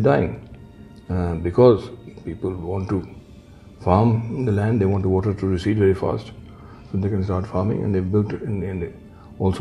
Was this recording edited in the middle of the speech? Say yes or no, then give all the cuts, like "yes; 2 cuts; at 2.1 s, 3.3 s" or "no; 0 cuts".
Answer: no; 0 cuts